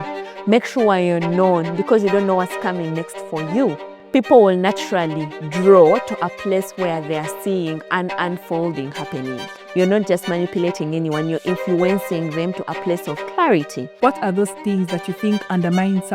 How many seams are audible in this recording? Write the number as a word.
three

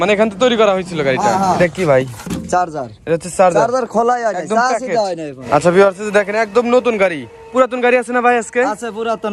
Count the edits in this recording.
two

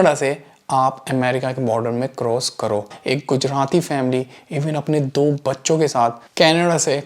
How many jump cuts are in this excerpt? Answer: one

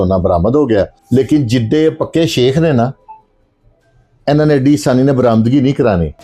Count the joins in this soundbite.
one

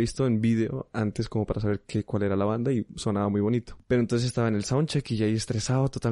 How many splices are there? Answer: one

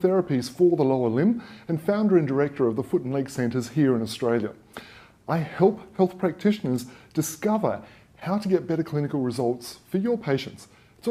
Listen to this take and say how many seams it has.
one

